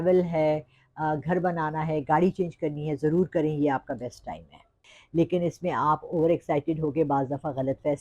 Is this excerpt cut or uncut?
cut